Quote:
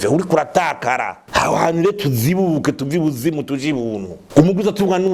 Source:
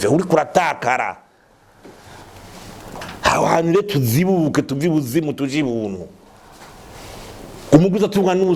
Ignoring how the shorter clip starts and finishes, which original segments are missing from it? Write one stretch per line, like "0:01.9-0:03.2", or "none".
0:01.2-0:03.1
0:06.1-0:07.5